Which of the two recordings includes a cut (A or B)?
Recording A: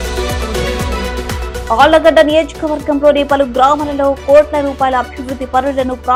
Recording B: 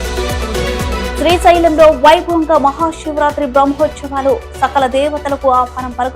B